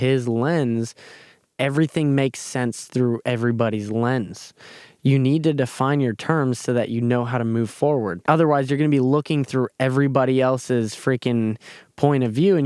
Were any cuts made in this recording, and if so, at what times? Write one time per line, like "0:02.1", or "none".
0:08.2